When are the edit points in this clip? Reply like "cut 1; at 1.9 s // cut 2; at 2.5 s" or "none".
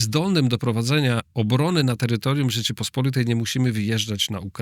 none